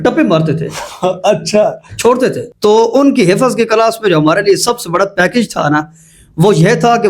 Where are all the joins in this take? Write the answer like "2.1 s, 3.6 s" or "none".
2.5 s